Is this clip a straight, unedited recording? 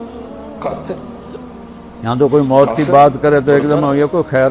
no; 1 cut; at 1.3 s

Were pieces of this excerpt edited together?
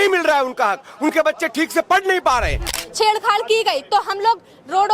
yes; 1 cut; at 2.7 s

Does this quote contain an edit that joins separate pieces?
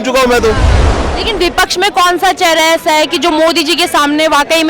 yes; 1 cut; at 1.1 s

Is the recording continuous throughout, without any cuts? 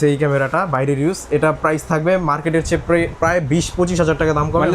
yes; 0 cuts

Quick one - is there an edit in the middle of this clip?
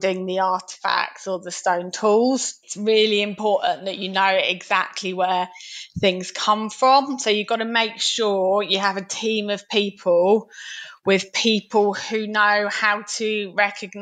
no; 0 cuts

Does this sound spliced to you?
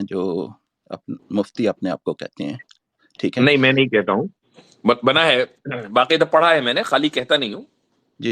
no; 0 cuts

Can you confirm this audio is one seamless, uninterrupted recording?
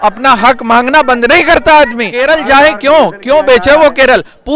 no; 1 cut; at 2.1 s

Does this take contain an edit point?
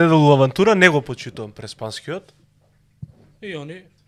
no; 0 cuts

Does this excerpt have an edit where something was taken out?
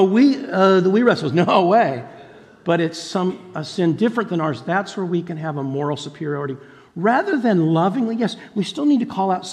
no; 0 cuts

